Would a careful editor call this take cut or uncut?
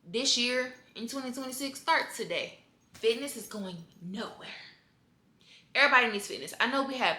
cut